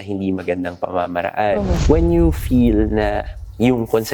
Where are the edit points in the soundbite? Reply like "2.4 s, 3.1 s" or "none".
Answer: 1.8 s